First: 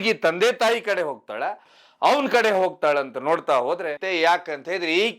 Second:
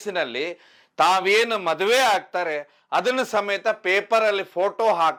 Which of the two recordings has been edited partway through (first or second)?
first